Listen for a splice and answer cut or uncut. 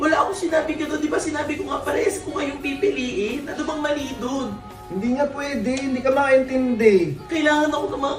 cut